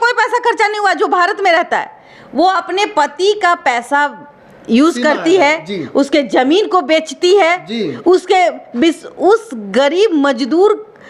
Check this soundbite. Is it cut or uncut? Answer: uncut